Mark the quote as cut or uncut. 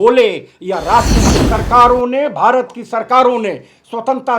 cut